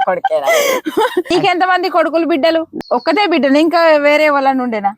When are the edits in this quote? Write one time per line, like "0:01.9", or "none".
0:01.3
0:02.7